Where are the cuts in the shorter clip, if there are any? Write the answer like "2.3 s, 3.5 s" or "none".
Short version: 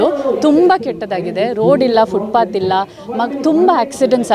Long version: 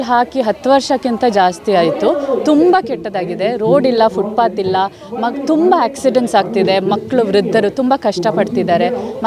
none